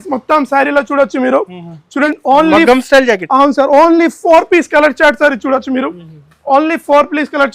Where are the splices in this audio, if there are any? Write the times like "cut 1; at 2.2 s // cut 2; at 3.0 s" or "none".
cut 1; at 2.1 s

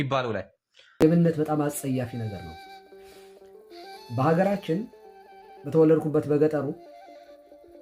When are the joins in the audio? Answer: cut 1; at 1.0 s

